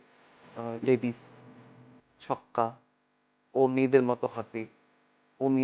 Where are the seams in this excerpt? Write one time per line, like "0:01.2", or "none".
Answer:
0:03.3